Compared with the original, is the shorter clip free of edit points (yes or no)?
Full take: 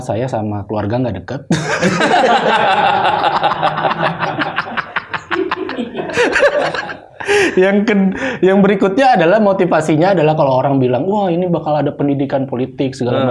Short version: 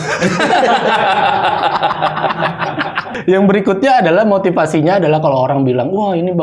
no